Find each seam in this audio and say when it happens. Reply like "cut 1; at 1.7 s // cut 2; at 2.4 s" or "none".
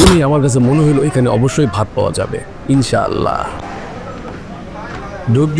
cut 1; at 3.5 s